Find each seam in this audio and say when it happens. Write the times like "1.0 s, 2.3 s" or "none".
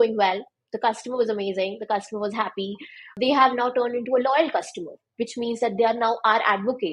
3.1 s